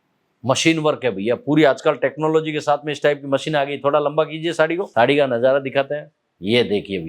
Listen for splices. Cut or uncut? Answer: cut